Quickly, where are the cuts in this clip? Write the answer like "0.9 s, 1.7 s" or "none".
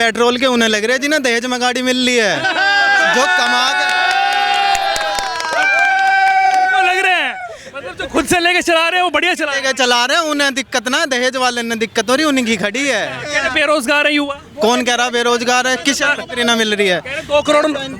none